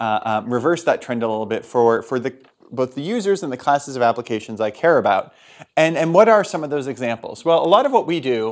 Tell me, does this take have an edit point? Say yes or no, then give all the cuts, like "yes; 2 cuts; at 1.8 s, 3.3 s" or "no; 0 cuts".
no; 0 cuts